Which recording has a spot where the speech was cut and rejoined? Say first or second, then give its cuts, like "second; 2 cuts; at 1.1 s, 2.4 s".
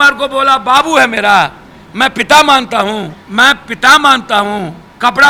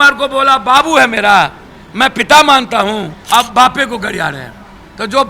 second; 1 cut; at 3.2 s